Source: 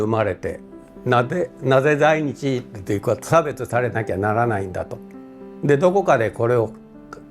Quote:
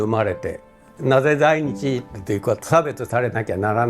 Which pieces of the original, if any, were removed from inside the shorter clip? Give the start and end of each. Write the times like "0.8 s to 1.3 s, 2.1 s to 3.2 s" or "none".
0.9 s to 1.5 s